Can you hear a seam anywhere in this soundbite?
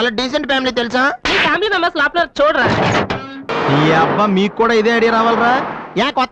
yes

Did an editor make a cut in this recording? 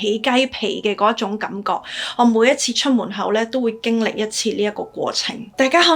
no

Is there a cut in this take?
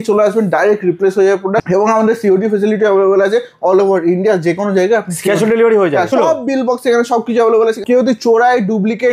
yes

